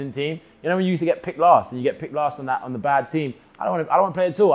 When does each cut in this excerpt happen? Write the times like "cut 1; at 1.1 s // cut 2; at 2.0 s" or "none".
none